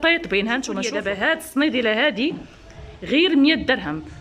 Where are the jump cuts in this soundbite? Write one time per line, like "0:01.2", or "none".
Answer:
0:00.9